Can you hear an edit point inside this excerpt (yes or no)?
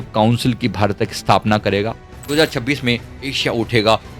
yes